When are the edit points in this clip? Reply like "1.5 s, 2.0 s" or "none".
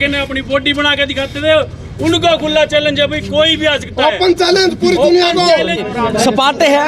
5.8 s